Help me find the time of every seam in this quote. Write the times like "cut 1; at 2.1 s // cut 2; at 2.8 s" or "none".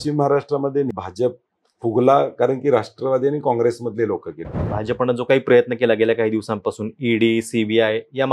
cut 1; at 0.9 s // cut 2; at 4.7 s